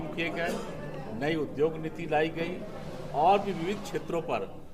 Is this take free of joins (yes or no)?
yes